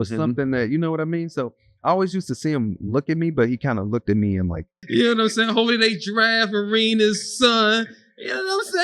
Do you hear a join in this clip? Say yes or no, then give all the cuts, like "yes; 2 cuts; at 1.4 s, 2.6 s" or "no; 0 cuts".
yes; 1 cut; at 4.7 s